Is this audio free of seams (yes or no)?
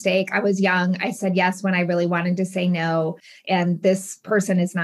no